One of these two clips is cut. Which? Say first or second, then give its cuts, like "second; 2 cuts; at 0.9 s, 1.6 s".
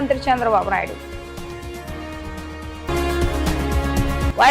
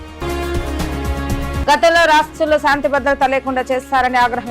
second; 1 cut; at 1.4 s